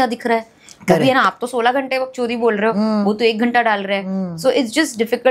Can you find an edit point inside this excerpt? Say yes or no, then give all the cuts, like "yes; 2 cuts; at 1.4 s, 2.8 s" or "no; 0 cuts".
no; 0 cuts